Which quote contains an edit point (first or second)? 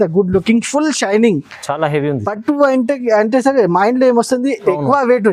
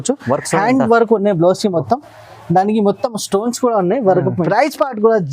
second